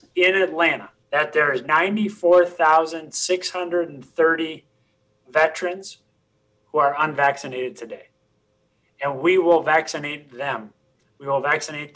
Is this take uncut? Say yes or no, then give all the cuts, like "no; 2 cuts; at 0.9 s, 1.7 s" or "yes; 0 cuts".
no; 1 cut; at 0.9 s